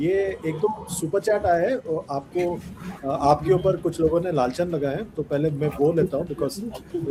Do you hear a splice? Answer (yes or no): no